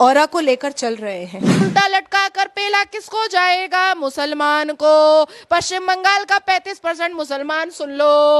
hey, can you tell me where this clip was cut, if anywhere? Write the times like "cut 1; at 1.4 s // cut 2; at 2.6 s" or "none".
cut 1; at 1.7 s